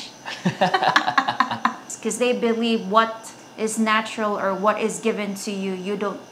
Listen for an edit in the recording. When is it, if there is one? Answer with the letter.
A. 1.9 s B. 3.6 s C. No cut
A